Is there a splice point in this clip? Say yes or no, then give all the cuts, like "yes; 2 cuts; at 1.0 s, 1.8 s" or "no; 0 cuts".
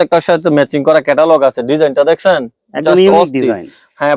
no; 0 cuts